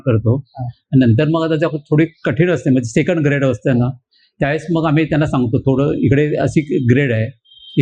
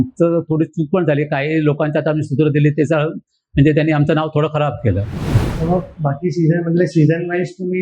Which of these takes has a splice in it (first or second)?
second